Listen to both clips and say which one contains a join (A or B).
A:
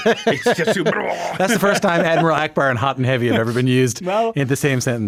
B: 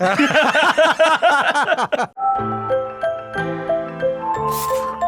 B